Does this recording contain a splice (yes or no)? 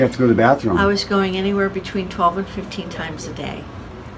no